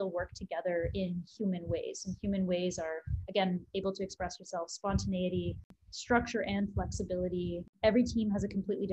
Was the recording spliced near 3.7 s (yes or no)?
no